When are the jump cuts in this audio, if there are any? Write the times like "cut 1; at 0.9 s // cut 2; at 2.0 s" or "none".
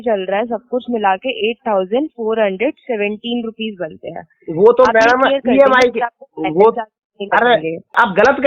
none